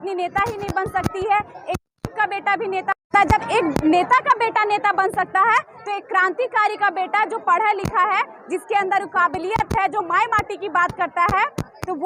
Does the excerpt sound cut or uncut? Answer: uncut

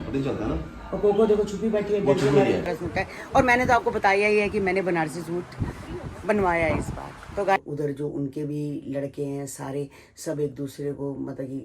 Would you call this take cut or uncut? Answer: cut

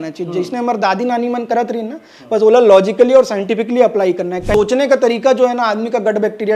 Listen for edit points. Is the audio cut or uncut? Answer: cut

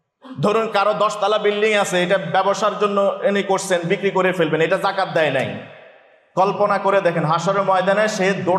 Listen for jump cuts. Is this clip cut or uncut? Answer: uncut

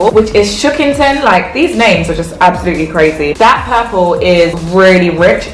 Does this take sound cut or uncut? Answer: cut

